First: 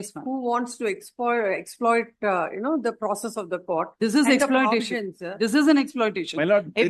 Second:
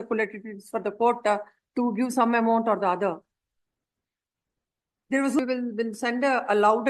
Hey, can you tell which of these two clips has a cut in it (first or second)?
second